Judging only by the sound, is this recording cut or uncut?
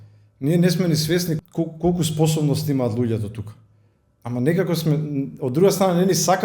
cut